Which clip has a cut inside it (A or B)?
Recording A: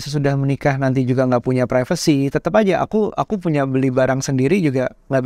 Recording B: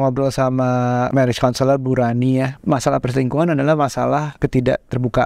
B